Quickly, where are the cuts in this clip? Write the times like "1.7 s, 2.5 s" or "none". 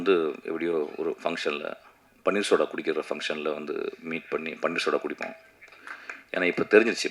none